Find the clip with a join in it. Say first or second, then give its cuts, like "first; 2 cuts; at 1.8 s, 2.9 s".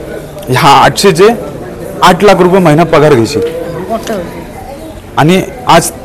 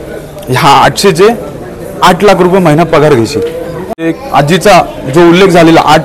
second; 1 cut; at 4.1 s